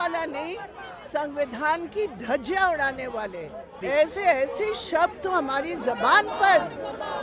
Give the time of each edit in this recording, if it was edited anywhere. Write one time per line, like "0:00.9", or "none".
0:03.8